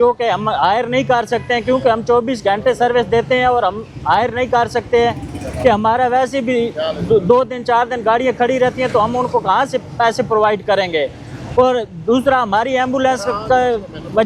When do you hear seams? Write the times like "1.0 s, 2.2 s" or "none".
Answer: none